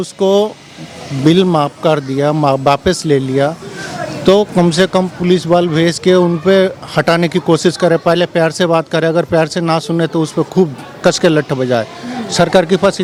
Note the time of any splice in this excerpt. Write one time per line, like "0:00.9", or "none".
none